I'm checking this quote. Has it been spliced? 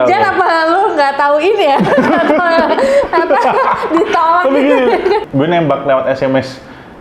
yes; 1 cut; at 5.2 s

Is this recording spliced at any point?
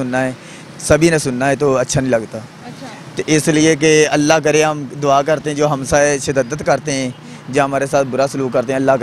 no; 0 cuts

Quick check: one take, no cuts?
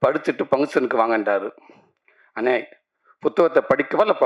yes; 0 cuts

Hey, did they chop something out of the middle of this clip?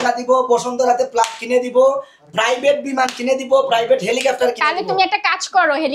no; 0 cuts

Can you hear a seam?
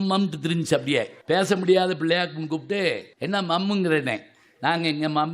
yes; 2 cuts; at 1.1 s, 3.1 s

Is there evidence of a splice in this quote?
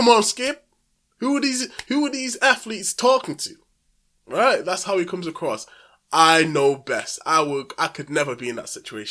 no; 0 cuts

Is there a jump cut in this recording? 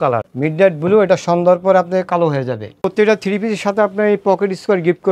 yes; 1 cut; at 2.8 s

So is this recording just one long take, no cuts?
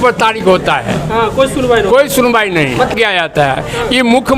no; 1 cut; at 2.9 s

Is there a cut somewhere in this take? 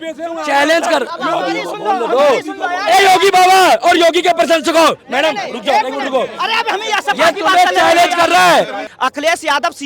yes; 1 cut; at 8.8 s

